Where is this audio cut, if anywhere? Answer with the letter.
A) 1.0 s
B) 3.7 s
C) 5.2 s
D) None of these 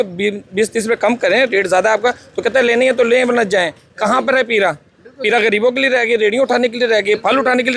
D